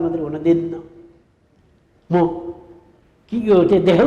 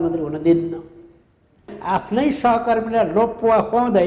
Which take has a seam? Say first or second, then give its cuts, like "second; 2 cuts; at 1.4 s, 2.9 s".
second; 1 cut; at 1.7 s